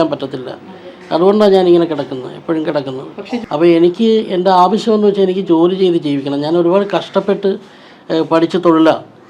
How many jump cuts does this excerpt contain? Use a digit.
1